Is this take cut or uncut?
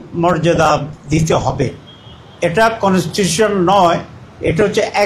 uncut